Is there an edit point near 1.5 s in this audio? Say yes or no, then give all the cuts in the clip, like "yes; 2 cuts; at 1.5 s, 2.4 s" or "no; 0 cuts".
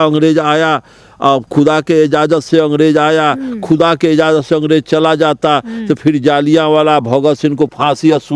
yes; 1 cut; at 1.5 s